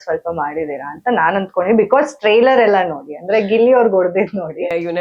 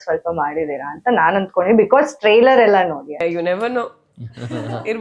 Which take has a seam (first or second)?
second